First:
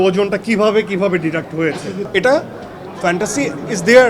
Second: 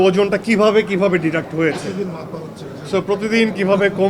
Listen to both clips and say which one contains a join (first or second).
first